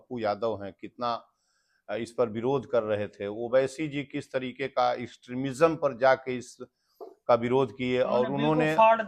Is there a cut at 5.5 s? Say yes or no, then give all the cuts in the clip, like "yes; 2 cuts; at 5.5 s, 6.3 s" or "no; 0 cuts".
no; 0 cuts